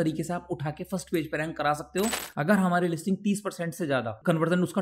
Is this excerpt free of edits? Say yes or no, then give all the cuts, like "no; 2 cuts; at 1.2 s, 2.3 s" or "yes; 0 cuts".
no; 1 cut; at 2.2 s